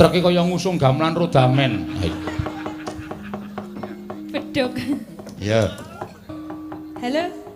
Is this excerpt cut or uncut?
cut